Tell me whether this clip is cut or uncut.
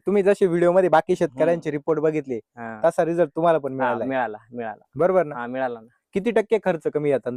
uncut